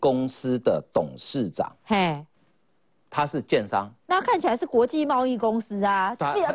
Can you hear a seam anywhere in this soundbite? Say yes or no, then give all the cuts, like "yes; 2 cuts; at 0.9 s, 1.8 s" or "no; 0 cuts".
no; 0 cuts